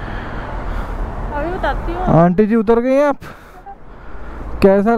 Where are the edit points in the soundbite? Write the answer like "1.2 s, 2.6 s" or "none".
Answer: none

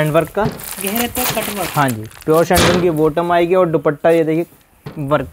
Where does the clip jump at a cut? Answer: none

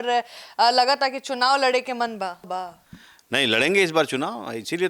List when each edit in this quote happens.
2.5 s

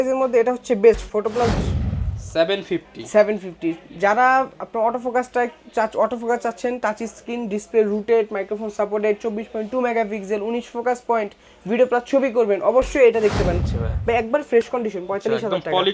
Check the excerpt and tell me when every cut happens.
1.6 s, 13.6 s

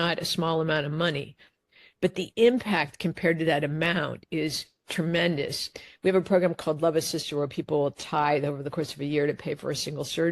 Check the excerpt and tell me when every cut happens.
5.7 s

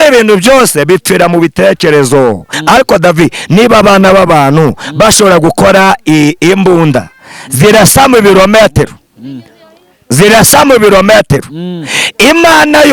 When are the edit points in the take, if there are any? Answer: 2.5 s

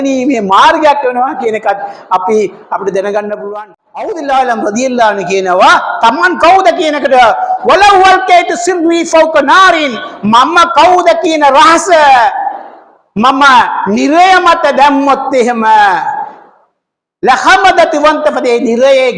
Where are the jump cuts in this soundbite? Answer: 3.5 s

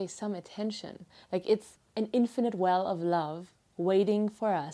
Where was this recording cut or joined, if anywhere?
1.8 s

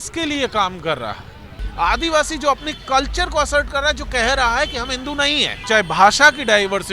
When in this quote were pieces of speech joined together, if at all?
1.6 s, 5.5 s

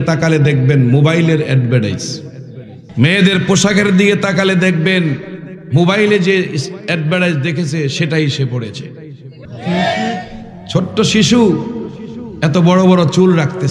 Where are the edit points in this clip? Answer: 2.8 s, 9.4 s

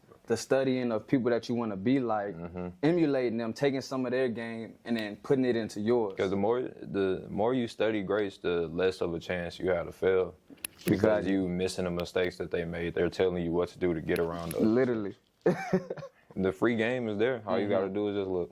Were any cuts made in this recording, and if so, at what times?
16.3 s

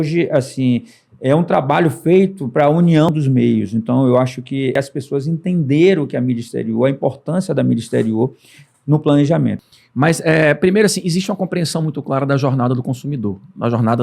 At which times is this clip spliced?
3.1 s, 4.8 s, 9.6 s

